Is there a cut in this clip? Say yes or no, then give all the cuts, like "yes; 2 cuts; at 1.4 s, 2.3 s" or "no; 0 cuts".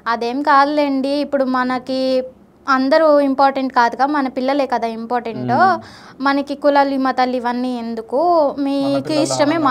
no; 0 cuts